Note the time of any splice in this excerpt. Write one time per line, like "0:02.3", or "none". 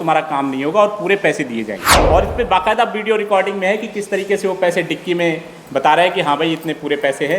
0:01.9